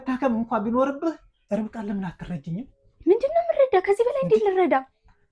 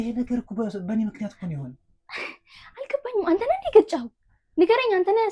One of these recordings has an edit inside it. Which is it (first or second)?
first